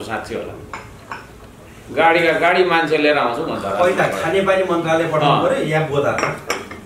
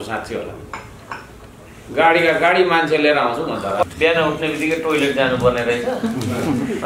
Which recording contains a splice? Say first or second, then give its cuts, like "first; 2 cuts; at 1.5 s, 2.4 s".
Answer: second; 1 cut; at 3.8 s